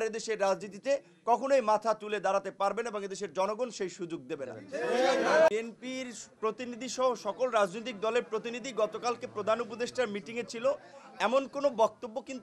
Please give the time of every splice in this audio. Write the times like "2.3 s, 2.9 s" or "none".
5.5 s